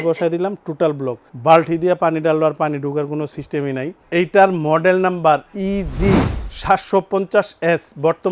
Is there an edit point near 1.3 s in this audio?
no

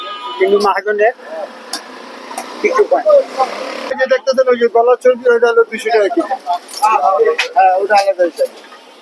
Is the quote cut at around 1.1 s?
no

